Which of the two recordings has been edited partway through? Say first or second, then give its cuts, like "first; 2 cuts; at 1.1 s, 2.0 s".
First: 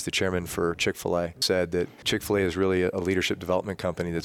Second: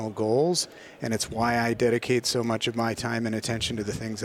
first; 2 cuts; at 1.4 s, 2.9 s